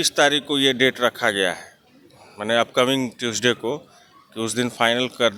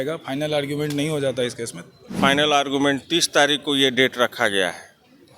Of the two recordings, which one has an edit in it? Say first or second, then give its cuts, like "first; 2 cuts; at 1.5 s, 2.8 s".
second; 1 cut; at 2.2 s